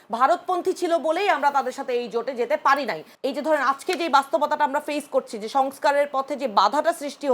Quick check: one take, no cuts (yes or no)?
no